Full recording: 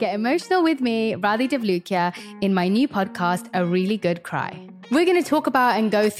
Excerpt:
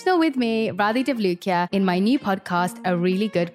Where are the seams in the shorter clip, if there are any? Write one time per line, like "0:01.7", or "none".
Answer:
0:01.7

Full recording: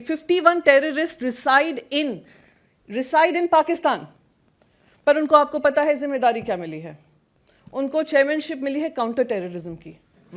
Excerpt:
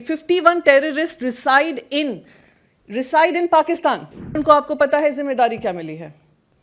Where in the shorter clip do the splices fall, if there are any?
0:04.4

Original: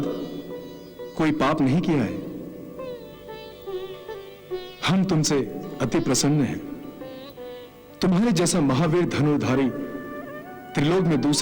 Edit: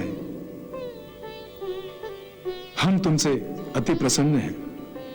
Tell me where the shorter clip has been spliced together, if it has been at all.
none

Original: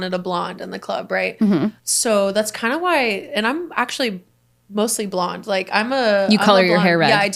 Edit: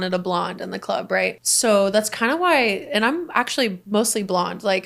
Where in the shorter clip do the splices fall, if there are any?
0:01.3
0:03.8

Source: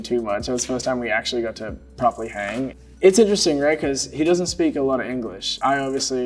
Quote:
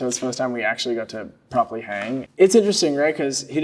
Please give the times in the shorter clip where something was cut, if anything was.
0:02.3

